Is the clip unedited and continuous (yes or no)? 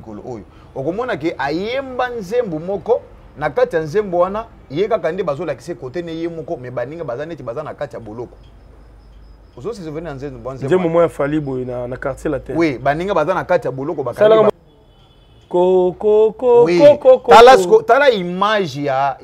no